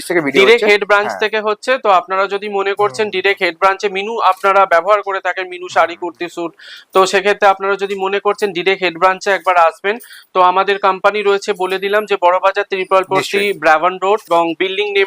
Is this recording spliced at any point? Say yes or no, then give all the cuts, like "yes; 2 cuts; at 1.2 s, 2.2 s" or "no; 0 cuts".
no; 0 cuts